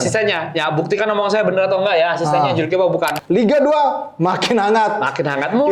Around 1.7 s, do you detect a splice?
no; 1 cut; at 3.1 s

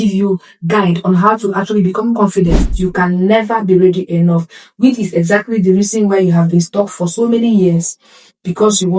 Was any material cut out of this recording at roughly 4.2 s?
no; 1 cut; at 2.7 s

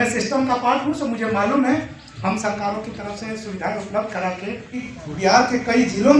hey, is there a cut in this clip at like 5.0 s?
yes; 1 cut; at 5.0 s

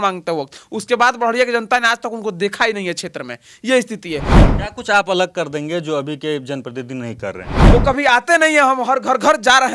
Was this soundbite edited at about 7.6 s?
yes; 2 cuts; at 4.3 s, 7.6 s

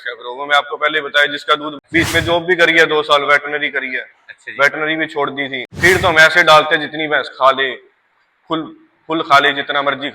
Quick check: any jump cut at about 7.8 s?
no; 2 cuts; at 1.7 s, 5.7 s

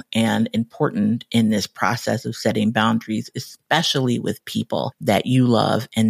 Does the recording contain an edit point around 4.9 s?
yes; 1 cut; at 4.9 s

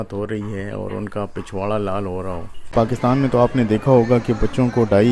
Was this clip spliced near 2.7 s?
yes; 1 cut; at 2.7 s

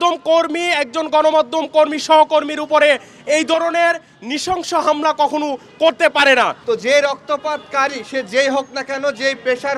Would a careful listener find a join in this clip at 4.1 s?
no; 1 cut; at 6.6 s

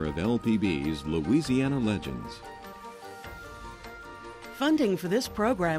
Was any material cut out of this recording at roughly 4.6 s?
yes; 1 cut; at 4.6 s

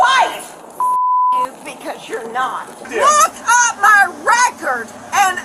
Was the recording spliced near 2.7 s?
yes; 1 cut; at 2.7 s

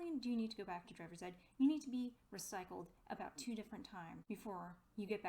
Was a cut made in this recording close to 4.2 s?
yes; 1 cut; at 4.2 s

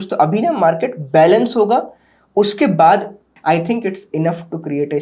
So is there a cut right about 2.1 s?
no; 1 cut; at 3.3 s

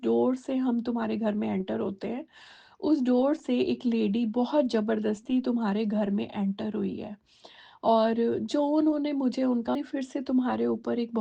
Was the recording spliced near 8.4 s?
no; 1 cut; at 9.8 s

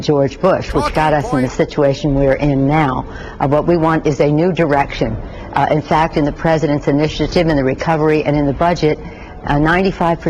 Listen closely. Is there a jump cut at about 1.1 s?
yes; 2 cuts; at 1.1 s, 3.5 s

